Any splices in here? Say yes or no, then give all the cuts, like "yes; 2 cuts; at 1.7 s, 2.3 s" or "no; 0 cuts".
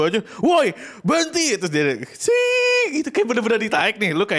no; 0 cuts